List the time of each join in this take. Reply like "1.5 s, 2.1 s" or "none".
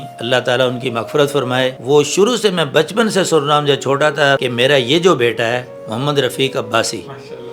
1.8 s, 4.4 s